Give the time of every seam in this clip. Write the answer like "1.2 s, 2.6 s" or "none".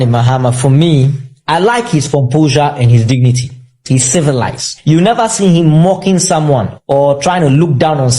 none

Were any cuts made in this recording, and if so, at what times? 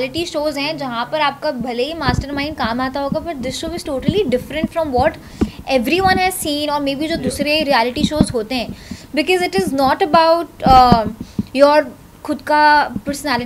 none

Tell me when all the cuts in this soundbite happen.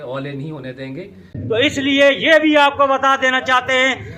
1.4 s

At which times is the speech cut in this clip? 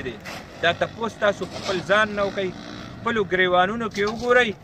1.5 s

